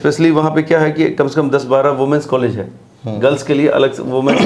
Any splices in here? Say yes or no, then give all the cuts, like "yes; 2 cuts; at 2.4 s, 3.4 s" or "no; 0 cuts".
no; 0 cuts